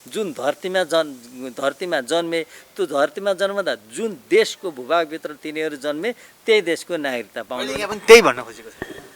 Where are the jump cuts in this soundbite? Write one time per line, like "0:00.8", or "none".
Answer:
none